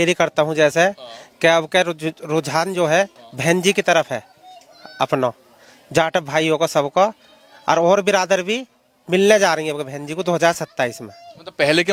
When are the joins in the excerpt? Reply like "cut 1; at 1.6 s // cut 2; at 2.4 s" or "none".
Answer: none